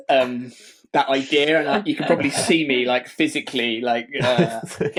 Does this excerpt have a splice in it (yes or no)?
no